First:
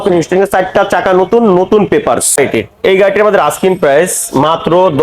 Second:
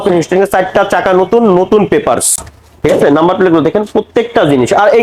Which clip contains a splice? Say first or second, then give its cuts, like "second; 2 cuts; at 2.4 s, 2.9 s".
first; 1 cut; at 2.4 s